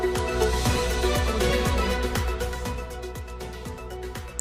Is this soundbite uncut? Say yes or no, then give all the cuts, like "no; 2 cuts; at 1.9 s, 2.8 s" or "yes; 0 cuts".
yes; 0 cuts